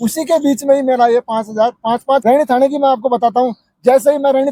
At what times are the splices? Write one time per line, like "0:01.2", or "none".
0:02.2